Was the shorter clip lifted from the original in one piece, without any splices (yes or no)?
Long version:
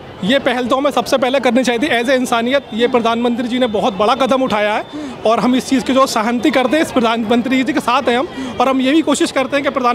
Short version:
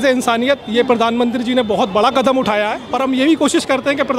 no